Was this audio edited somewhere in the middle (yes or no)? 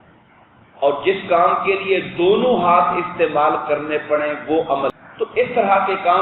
yes